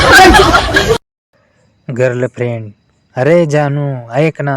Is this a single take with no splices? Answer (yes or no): no